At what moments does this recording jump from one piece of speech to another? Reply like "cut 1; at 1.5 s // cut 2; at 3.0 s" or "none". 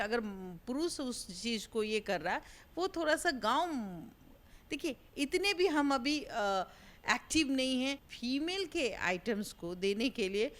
cut 1; at 8.0 s